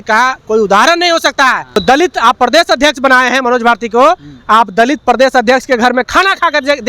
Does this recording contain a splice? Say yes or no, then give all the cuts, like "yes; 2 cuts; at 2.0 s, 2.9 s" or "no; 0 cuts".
yes; 1 cut; at 1.8 s